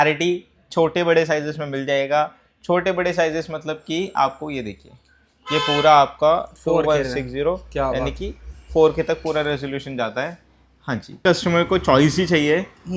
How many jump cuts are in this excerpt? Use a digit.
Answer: 1